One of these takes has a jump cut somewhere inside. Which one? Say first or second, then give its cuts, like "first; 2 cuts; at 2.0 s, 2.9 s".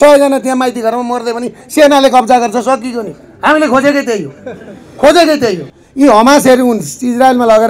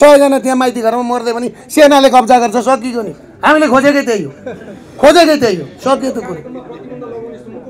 first; 1 cut; at 5.7 s